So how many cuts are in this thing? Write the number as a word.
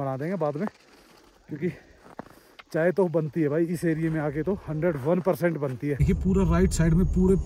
one